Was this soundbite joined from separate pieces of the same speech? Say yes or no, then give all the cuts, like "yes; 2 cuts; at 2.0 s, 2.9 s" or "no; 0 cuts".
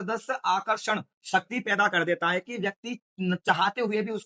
no; 0 cuts